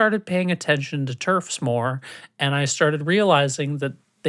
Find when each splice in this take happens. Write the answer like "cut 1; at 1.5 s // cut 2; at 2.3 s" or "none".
none